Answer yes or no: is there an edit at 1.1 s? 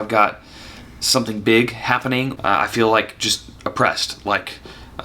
no